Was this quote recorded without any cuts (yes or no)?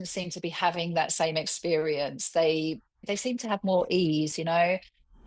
no